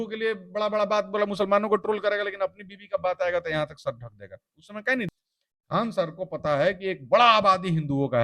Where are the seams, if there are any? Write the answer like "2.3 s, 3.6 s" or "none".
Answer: 5.1 s